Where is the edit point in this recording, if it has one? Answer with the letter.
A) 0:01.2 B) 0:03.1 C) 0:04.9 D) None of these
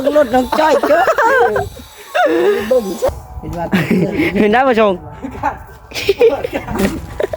B